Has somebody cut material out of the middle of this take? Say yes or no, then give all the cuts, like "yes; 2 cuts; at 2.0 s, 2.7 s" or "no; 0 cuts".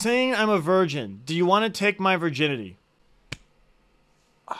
no; 0 cuts